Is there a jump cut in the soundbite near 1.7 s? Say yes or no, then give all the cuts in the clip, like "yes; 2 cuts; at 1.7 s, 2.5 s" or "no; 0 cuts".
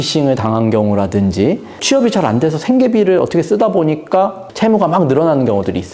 yes; 1 cut; at 1.7 s